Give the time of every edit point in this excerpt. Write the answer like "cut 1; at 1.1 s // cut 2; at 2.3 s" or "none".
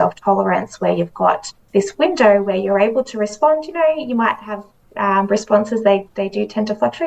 cut 1; at 1.6 s